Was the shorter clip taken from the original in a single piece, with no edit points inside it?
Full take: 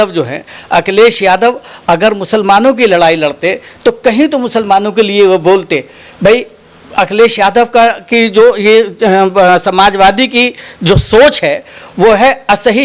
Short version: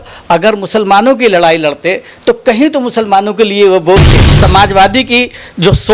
no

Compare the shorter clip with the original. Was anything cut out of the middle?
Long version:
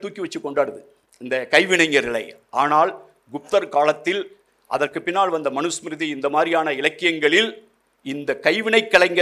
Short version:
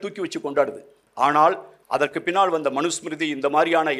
yes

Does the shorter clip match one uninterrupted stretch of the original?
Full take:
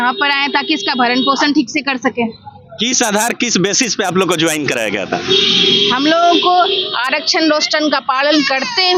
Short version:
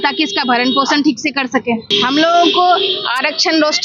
no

